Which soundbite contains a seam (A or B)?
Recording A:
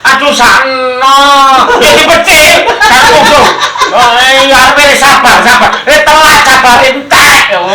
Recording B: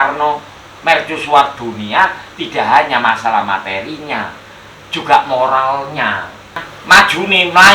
B